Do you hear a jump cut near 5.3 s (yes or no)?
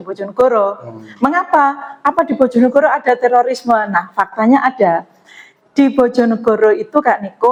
no